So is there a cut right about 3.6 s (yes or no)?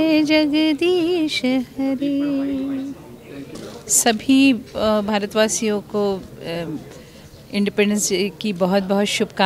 yes